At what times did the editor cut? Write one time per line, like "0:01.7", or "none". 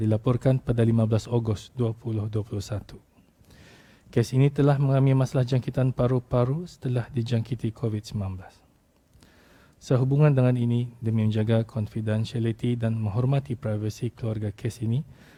none